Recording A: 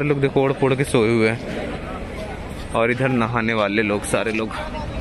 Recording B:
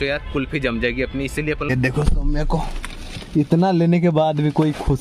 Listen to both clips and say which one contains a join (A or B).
B